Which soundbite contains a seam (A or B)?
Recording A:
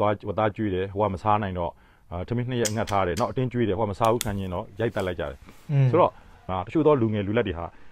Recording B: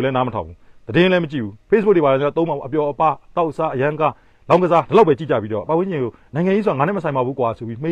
A